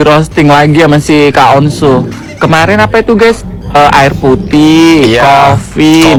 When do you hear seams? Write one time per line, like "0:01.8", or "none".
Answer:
none